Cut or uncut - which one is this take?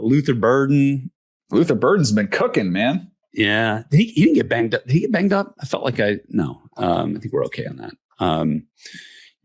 uncut